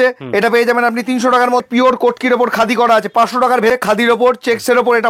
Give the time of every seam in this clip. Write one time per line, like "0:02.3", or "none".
0:01.6
0:03.7

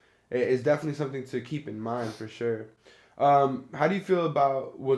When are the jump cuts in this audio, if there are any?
none

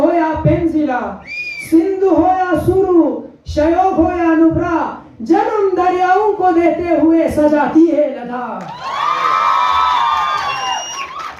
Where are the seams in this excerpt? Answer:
none

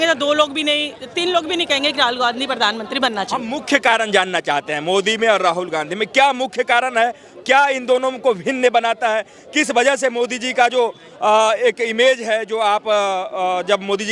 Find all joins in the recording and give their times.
none

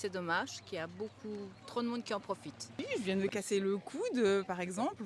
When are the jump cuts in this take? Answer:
0:02.8

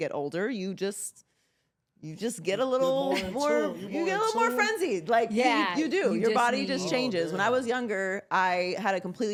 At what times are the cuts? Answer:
none

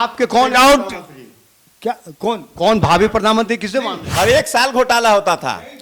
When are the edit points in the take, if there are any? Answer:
0:04.0

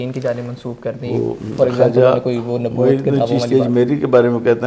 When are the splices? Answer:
none

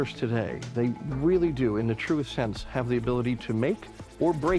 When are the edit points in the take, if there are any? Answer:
none

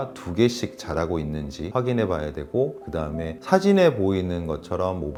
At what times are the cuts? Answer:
none

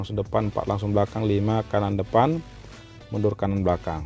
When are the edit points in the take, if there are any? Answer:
none

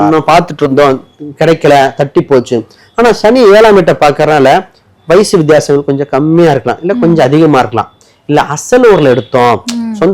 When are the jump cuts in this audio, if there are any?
none

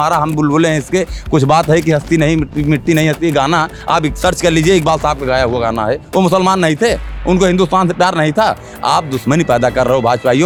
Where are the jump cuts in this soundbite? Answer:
none

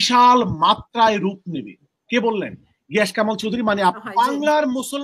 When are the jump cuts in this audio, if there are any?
0:04.0

